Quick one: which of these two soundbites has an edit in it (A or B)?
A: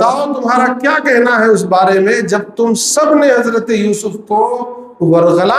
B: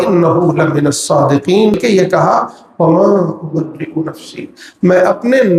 B